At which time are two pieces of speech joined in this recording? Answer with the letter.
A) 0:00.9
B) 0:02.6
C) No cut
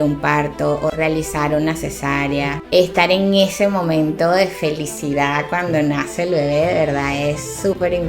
B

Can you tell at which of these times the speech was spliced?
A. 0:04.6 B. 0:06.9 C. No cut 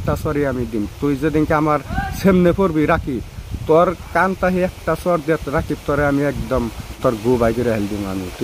B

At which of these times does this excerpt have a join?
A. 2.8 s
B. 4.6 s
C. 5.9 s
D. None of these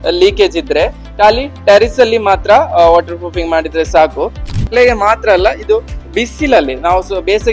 B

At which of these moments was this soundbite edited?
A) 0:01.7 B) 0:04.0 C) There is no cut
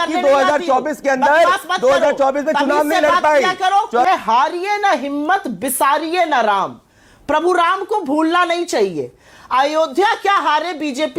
B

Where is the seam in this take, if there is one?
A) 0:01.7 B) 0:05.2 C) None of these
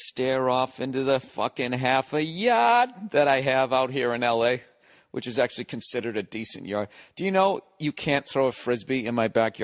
B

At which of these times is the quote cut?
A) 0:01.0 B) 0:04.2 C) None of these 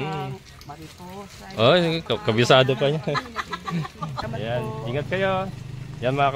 B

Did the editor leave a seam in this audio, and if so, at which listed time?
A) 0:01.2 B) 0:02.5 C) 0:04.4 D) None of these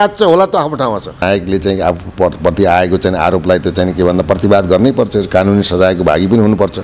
A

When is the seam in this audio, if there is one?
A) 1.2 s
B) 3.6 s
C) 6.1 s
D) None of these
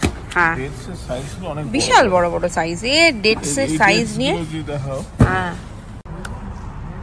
C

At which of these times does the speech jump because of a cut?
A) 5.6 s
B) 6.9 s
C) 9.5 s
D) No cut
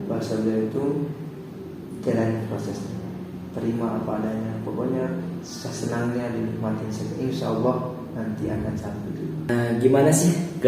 C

